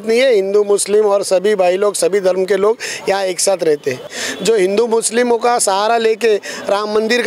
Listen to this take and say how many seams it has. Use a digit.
1